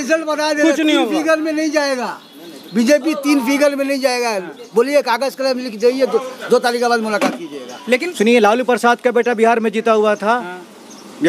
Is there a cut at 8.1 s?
yes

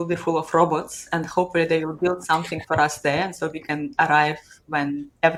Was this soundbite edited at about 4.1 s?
no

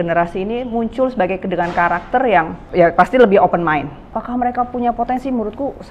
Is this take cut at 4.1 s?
yes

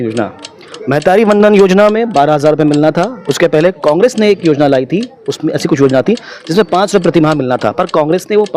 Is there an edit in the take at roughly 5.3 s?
no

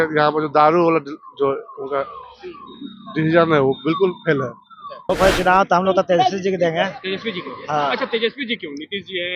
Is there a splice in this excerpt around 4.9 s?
yes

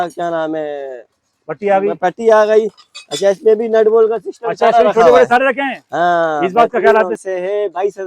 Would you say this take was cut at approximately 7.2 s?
yes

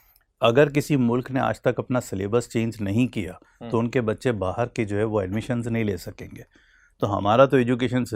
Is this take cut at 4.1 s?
no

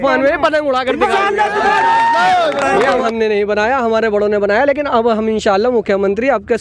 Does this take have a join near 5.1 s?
no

